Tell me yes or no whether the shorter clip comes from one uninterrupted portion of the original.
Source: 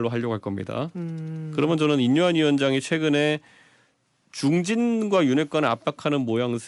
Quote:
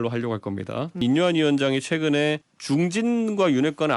no